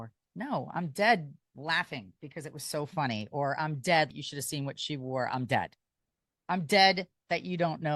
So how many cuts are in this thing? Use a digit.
1